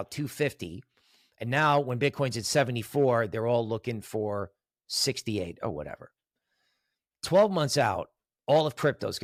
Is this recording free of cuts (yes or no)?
yes